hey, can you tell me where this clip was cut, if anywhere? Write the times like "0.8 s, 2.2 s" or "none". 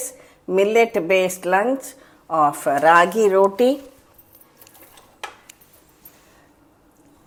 none